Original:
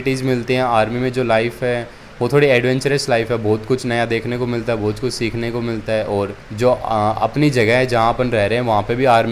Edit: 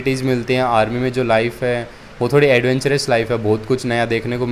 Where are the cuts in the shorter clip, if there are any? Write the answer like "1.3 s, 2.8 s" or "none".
none